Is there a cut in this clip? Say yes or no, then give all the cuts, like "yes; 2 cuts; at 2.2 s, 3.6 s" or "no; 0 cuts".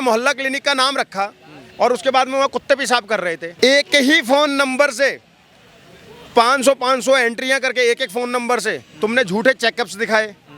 no; 0 cuts